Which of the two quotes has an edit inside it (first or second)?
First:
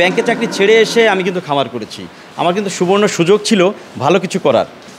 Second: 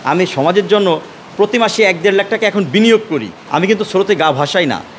second